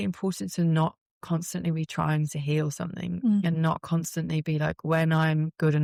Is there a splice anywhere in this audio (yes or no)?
no